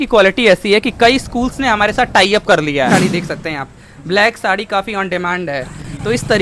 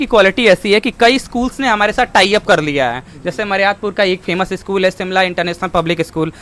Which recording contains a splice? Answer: first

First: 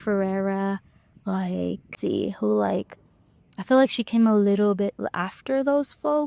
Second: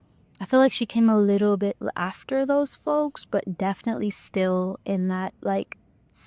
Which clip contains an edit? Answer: first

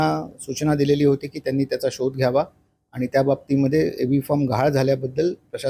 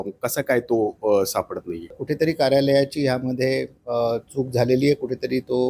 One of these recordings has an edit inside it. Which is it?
second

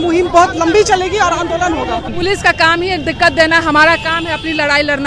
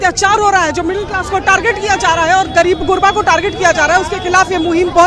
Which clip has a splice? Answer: first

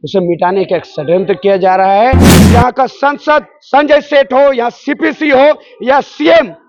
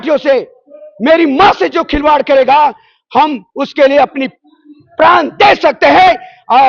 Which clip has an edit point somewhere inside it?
first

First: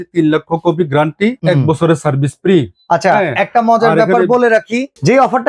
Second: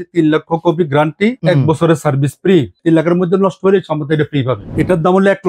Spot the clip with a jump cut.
second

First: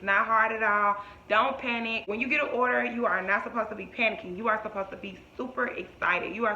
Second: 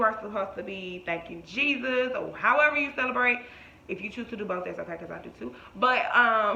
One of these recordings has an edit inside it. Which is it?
first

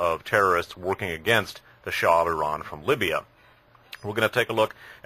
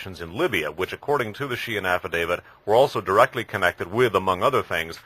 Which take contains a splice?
second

